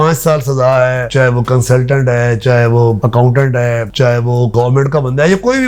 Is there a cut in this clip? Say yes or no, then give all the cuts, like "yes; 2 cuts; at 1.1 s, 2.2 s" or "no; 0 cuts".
yes; 1 cut; at 4.5 s